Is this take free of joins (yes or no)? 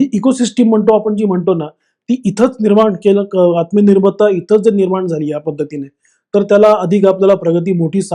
yes